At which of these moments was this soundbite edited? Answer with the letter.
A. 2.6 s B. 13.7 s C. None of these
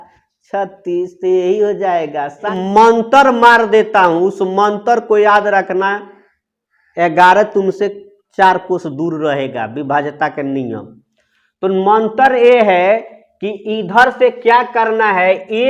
A